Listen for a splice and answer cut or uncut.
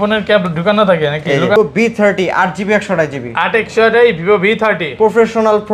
cut